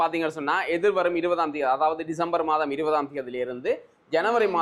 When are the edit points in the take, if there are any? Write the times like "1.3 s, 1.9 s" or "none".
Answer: none